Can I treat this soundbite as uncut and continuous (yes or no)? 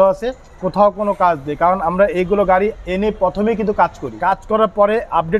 no